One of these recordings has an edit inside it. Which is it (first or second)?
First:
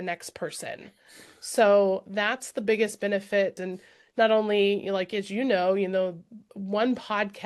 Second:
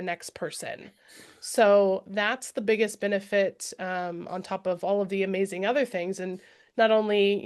first